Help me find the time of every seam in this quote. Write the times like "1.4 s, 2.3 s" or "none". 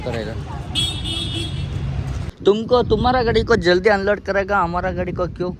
2.2 s